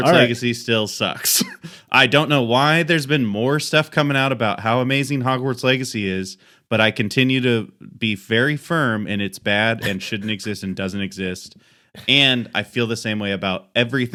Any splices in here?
no; 0 cuts

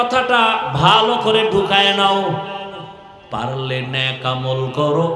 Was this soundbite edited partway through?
no; 0 cuts

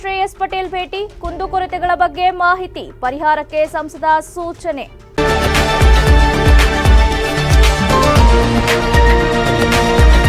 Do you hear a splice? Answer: yes; 1 cut; at 5.0 s

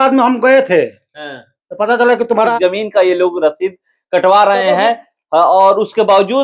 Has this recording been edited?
yes; 1 cut; at 2.5 s

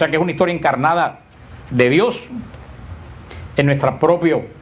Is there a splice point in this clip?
no; 0 cuts

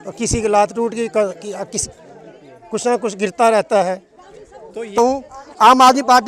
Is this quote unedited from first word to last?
no; 1 cut; at 5.0 s

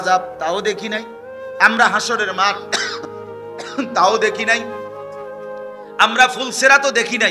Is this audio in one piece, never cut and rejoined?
no; 2 cuts; at 4.6 s, 5.9 s

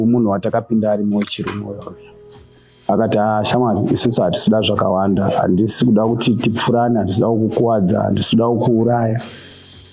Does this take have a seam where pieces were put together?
no; 0 cuts

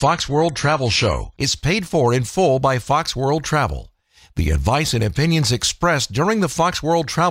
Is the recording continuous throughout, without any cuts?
no; 1 cut; at 1.3 s

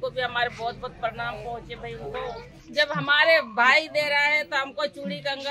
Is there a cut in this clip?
yes; 1 cut; at 2.6 s

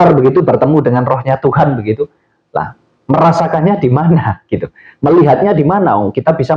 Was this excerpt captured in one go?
yes; 0 cuts

